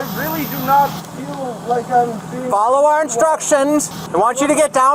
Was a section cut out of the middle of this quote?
yes; 1 cut; at 4.0 s

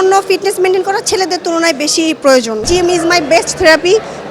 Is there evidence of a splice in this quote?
yes; 1 cut; at 2.6 s

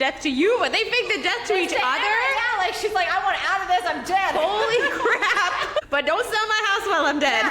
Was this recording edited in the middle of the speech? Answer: no; 0 cuts

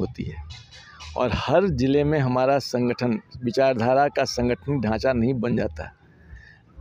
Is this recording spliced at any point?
no; 0 cuts

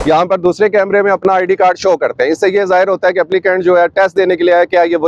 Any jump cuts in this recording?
no; 0 cuts

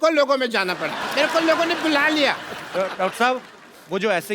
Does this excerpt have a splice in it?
yes; 1 cut; at 1.0 s

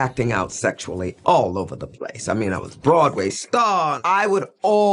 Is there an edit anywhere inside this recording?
no; 0 cuts

